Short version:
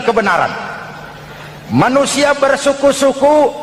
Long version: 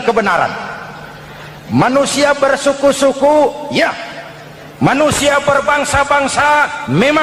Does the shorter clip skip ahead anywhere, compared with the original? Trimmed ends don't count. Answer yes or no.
no